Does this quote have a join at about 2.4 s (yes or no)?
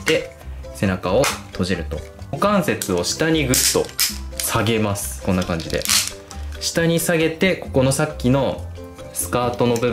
yes